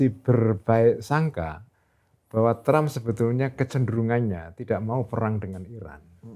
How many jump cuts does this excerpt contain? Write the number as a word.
zero